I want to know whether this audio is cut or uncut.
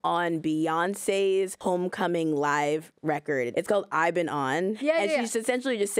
cut